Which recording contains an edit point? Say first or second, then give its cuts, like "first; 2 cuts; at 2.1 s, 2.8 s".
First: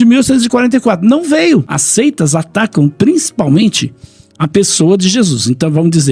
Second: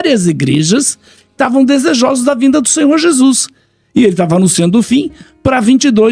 first; 1 cut; at 1.8 s